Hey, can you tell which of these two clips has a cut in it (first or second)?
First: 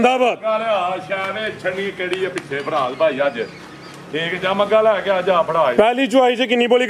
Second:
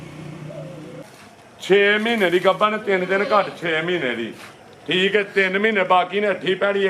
second